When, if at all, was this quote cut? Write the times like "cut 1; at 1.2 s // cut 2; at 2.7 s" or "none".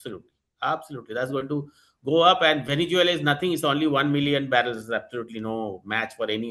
none